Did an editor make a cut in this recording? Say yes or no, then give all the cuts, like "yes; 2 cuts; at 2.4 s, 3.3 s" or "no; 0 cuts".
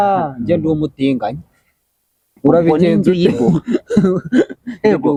no; 0 cuts